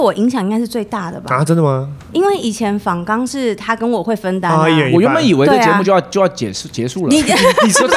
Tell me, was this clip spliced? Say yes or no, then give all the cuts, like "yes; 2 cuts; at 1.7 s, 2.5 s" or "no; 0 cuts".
no; 0 cuts